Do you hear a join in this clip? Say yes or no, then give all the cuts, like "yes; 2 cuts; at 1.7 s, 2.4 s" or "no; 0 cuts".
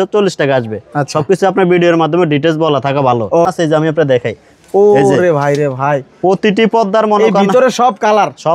yes; 1 cut; at 3.5 s